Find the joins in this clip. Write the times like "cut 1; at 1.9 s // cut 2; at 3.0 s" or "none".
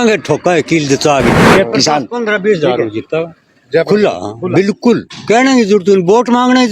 cut 1; at 1.4 s